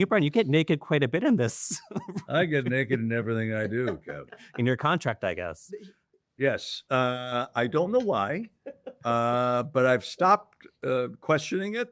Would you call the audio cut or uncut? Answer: uncut